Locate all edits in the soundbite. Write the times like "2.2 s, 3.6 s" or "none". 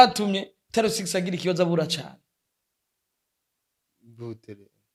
none

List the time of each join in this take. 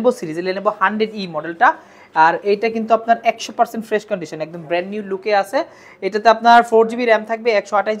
none

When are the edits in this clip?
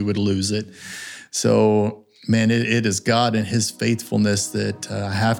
none

